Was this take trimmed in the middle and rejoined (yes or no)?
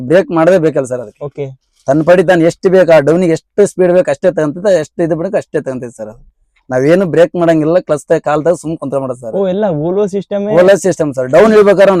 no